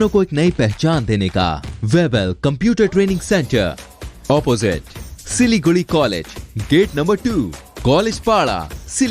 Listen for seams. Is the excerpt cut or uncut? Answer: cut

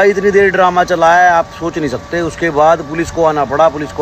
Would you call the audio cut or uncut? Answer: uncut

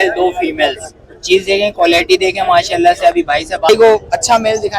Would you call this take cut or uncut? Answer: cut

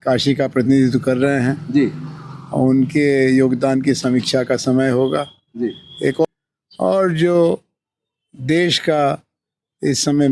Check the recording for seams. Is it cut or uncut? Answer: cut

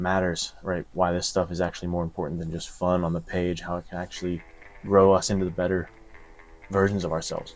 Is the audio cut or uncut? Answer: uncut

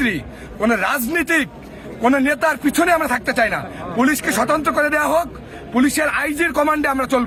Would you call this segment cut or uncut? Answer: uncut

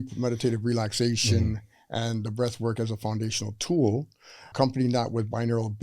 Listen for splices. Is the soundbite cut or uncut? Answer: cut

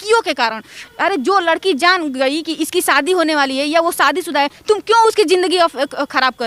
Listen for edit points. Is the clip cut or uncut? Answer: uncut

